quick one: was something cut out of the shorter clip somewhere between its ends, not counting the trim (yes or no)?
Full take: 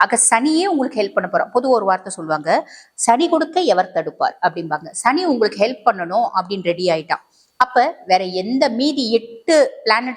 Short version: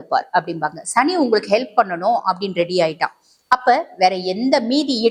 no